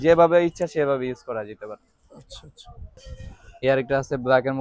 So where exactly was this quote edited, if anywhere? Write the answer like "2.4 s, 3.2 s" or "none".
3.0 s